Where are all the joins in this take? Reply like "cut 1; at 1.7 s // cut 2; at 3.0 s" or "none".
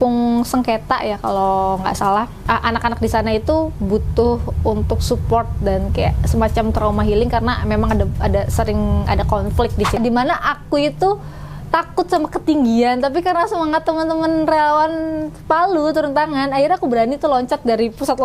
cut 1; at 2.4 s // cut 2; at 10.0 s